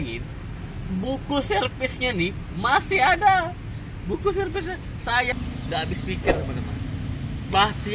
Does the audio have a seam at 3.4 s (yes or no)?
no